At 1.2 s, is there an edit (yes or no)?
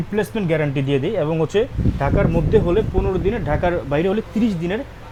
no